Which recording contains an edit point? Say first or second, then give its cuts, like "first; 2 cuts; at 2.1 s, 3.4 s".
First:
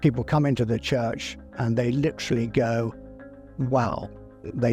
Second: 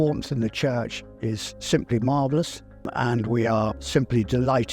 second; 2 cuts; at 2.9 s, 3.8 s